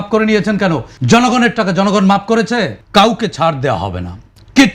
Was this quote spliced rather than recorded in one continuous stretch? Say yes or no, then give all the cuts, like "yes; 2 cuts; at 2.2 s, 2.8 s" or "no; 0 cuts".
yes; 2 cuts; at 0.9 s, 2.8 s